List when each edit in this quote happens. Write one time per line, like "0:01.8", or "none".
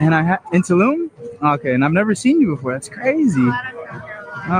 none